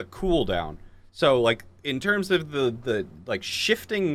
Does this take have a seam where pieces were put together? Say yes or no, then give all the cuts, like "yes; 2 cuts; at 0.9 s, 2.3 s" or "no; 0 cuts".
no; 0 cuts